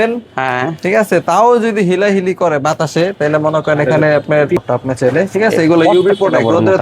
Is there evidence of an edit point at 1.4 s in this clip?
no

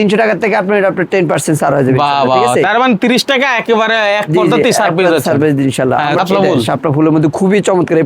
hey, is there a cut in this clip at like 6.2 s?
yes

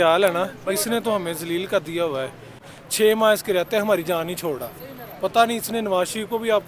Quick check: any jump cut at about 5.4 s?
no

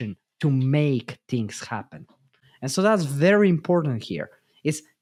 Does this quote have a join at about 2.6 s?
no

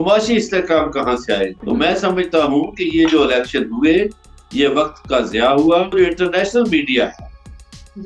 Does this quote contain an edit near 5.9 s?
yes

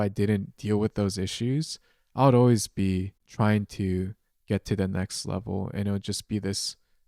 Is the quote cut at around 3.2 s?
yes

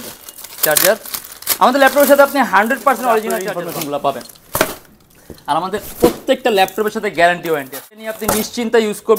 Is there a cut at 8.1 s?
yes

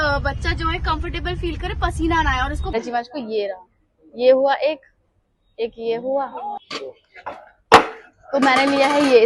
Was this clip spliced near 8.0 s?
no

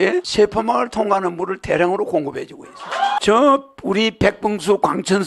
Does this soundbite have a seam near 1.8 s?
no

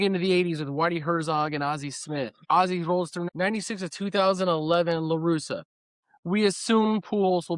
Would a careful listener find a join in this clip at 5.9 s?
no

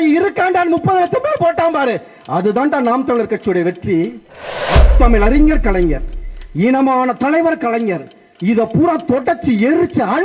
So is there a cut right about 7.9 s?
no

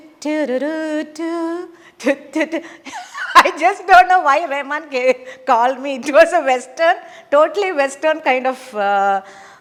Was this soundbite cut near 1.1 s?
no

